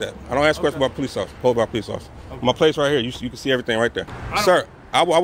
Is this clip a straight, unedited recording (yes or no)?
no